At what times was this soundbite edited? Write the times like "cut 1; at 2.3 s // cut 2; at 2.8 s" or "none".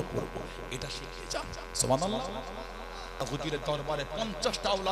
cut 1; at 3.2 s